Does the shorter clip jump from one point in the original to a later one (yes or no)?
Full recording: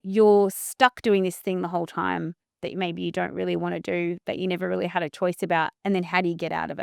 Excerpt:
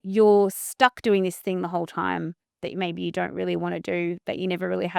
no